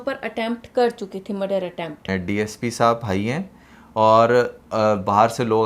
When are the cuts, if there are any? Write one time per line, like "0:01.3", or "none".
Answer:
0:02.0